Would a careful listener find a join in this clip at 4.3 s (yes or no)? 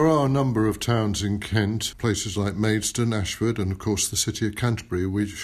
no